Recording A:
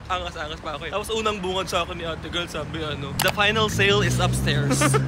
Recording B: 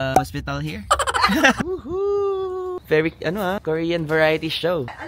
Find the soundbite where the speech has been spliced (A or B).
B